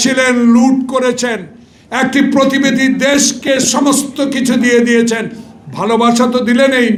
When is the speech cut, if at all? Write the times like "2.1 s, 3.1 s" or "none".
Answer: none